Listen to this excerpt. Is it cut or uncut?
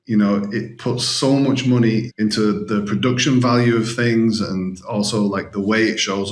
cut